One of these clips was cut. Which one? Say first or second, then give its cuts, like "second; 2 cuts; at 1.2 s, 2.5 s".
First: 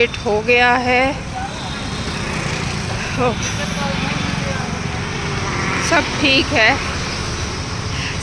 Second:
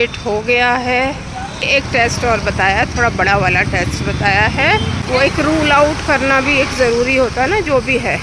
second; 2 cuts; at 1.6 s, 5.0 s